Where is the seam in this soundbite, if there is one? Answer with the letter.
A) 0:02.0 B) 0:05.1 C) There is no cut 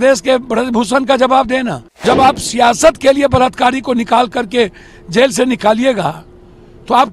A